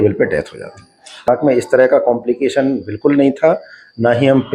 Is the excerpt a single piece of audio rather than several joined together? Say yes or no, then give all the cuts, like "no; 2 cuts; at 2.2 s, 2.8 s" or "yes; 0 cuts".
no; 1 cut; at 1.3 s